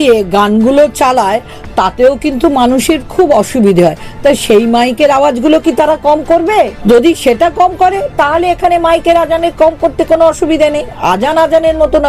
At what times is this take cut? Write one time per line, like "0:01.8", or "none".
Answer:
0:06.8